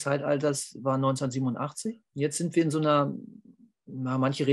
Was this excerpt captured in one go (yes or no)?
no